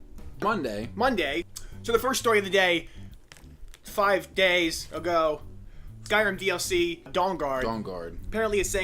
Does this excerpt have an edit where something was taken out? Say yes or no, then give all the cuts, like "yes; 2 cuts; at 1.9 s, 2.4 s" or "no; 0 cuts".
yes; 1 cut; at 4.9 s